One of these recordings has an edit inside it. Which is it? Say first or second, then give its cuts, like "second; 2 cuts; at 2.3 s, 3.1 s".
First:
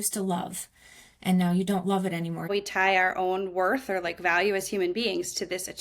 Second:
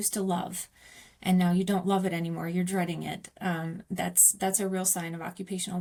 first; 1 cut; at 2.5 s